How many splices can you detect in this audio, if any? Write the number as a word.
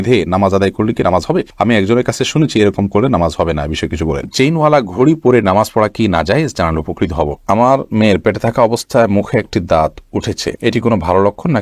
two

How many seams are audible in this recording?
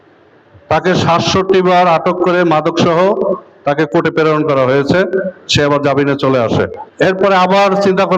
one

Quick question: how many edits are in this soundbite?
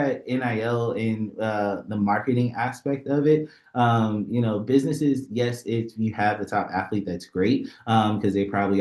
zero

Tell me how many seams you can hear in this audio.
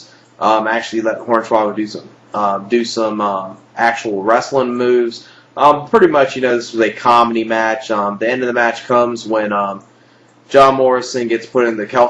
one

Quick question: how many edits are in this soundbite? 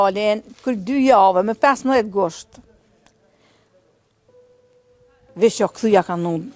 two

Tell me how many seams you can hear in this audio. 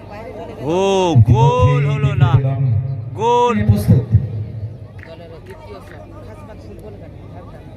one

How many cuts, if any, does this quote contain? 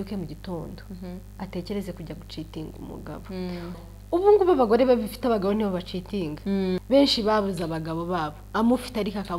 two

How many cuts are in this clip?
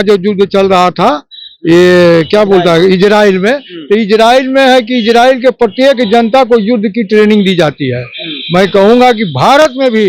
zero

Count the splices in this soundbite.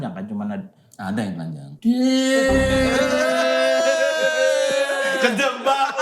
one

